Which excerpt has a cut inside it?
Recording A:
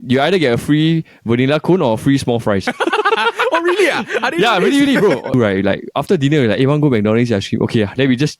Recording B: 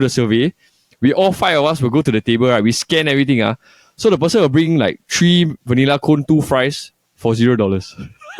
A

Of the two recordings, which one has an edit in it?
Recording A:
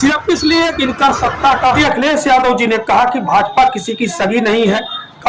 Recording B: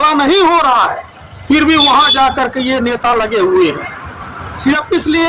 A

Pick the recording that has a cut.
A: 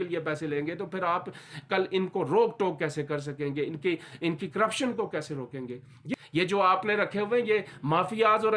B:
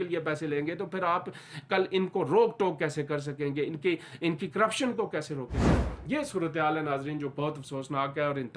A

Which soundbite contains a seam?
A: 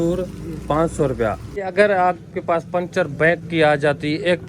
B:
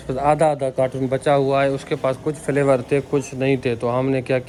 A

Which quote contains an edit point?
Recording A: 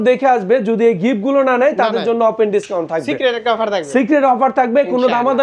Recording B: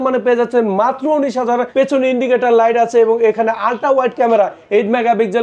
B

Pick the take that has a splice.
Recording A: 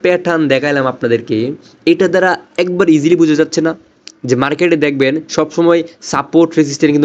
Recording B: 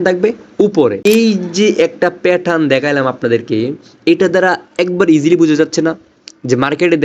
B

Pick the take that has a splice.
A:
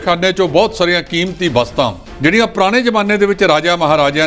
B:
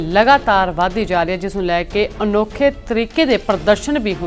A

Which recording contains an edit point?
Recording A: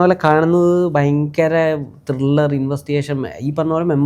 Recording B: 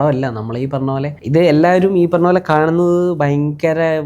B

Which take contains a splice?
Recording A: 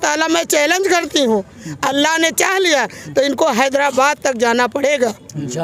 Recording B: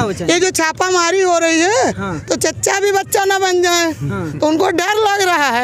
A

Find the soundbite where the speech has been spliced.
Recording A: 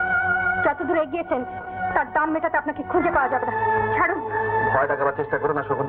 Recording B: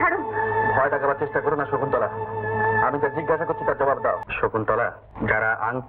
B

